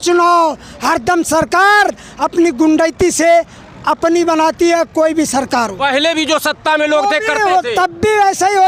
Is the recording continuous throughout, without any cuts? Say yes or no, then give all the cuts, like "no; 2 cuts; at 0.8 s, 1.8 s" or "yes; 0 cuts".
yes; 0 cuts